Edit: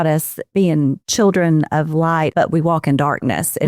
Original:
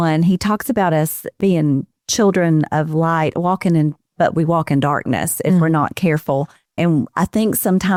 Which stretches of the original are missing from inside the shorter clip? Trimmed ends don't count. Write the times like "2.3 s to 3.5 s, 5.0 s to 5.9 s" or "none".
1.9 s to 2.0 s, 3.3 s to 4.1 s